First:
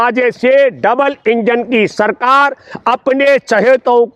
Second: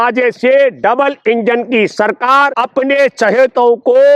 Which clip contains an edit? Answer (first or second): second